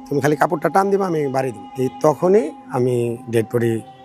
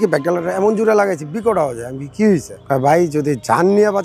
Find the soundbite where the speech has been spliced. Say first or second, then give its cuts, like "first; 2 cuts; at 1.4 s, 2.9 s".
second; 1 cut; at 2.5 s